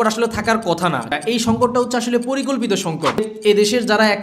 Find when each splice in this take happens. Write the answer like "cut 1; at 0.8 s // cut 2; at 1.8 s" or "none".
cut 1; at 1.1 s // cut 2; at 3.3 s